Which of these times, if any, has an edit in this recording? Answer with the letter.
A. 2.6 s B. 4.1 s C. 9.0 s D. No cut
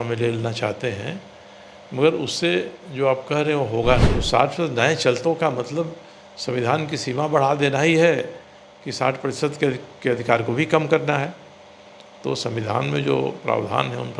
B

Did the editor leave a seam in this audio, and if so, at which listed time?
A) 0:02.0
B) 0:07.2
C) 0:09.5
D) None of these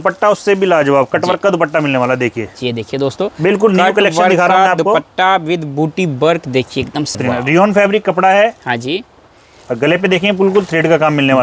B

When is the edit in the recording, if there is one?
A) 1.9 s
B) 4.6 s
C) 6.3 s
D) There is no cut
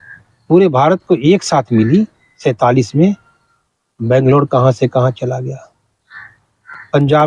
D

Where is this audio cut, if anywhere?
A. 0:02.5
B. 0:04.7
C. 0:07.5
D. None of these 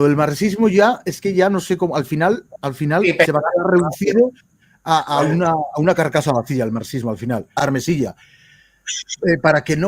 C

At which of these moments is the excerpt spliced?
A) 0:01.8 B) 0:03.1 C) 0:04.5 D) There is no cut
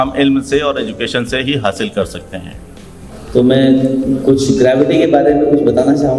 D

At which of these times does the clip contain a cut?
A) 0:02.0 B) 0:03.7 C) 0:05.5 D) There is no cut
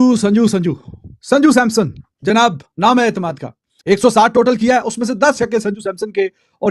B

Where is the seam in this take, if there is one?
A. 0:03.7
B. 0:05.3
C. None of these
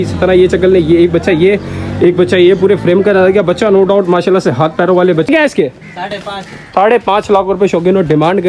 B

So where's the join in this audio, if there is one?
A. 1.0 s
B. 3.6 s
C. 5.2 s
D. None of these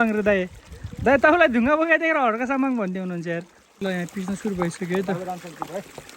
B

